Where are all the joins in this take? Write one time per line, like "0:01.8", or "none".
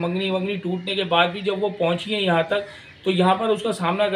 none